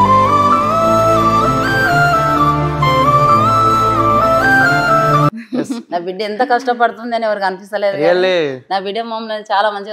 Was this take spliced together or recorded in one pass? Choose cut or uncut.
uncut